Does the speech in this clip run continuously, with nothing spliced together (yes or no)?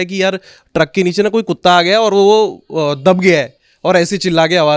yes